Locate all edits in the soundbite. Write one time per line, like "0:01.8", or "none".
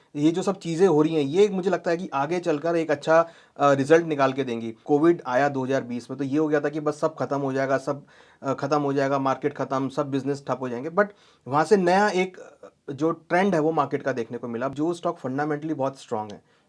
0:04.8
0:14.7

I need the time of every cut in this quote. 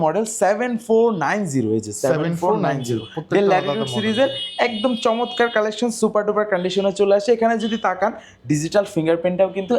none

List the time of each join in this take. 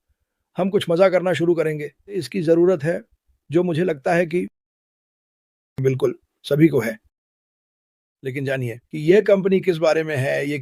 0:02.3

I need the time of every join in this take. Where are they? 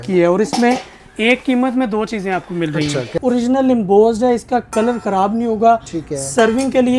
0:03.1

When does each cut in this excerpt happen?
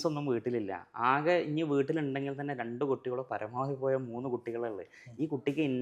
none

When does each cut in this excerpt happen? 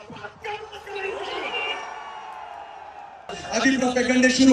0:03.4

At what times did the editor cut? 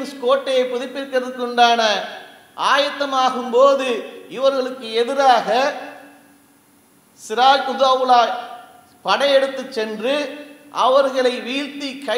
none

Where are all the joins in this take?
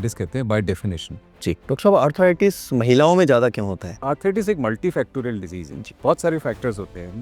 0:01.6
0:03.8

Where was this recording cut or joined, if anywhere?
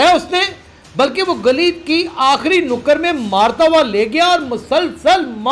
none

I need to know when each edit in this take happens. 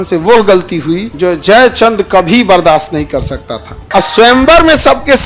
0:01.1
0:03.7

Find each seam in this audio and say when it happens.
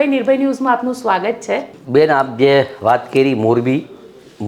0:01.8

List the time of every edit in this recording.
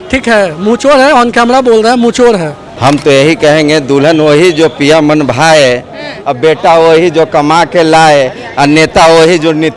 0:02.6

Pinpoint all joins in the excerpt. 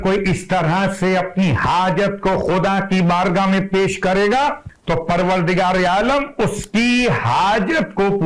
0:04.7

